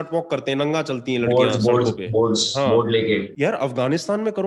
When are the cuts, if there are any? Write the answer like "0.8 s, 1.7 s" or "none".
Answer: 3.3 s